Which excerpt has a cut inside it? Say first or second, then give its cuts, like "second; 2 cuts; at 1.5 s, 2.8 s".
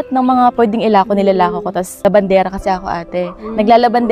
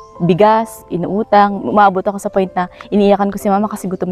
first; 1 cut; at 1.9 s